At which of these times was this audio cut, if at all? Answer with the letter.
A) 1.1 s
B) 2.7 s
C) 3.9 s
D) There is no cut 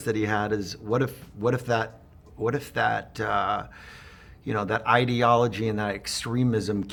D